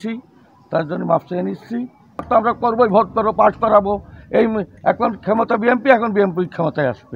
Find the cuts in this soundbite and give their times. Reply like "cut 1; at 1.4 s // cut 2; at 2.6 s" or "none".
cut 1; at 2.3 s